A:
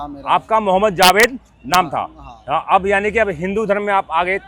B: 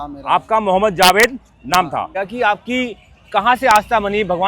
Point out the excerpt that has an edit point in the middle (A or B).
B